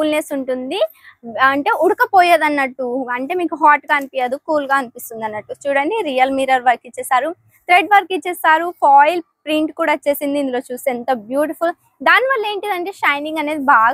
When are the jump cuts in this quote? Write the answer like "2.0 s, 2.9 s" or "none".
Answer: none